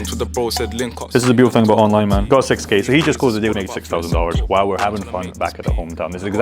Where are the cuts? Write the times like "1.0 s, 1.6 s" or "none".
1.1 s, 2.2 s, 3.5 s